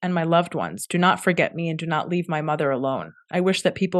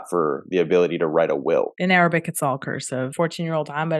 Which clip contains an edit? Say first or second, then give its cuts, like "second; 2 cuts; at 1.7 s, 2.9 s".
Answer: second; 2 cuts; at 1.7 s, 3.1 s